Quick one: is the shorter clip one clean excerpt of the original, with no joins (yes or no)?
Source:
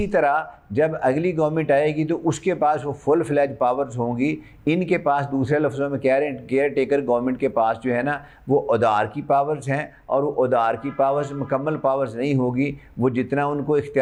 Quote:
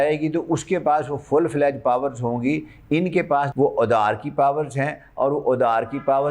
no